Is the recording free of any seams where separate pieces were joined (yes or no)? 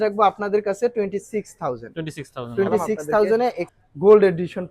no